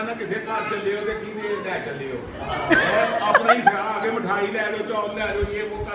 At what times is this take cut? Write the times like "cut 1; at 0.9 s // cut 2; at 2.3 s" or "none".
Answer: none